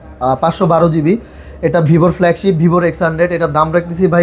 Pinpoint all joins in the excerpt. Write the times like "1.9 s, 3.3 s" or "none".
none